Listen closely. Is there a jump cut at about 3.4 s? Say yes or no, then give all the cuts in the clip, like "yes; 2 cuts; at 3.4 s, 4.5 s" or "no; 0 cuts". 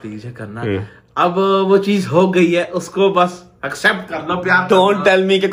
no; 0 cuts